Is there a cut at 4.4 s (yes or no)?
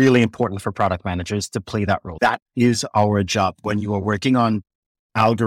no